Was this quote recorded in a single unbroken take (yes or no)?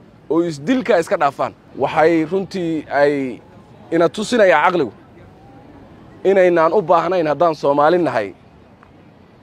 no